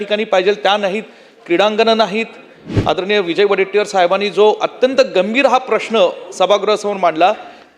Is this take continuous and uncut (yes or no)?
no